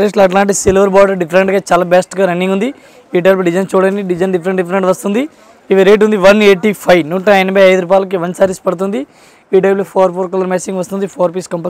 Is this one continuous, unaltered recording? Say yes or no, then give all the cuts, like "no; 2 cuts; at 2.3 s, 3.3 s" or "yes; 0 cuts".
yes; 0 cuts